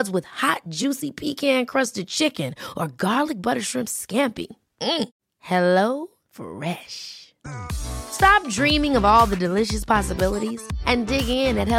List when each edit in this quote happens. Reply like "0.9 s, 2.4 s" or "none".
none